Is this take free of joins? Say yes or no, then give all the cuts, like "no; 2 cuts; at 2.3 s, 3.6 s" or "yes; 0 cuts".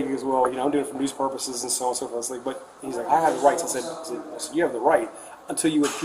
yes; 0 cuts